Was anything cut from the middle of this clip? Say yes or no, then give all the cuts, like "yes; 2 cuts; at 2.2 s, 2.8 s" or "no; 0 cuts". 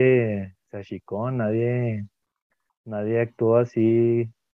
no; 0 cuts